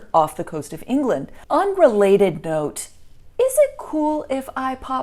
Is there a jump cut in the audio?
yes; 1 cut; at 1.3 s

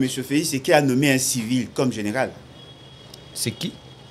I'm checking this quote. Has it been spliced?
no; 0 cuts

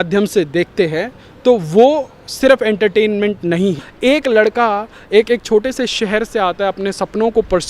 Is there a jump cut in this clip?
yes; 1 cut; at 3.9 s

